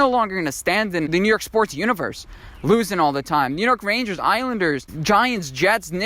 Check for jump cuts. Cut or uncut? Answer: cut